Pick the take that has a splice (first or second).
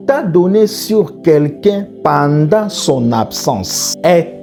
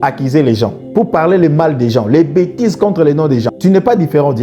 second